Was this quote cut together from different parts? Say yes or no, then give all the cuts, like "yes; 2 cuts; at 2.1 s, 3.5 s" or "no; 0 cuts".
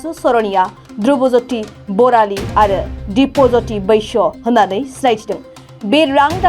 no; 0 cuts